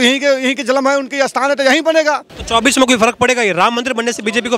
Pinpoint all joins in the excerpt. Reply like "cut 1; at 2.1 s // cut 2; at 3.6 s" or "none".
cut 1; at 2.3 s